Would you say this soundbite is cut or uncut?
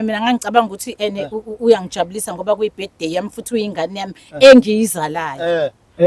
uncut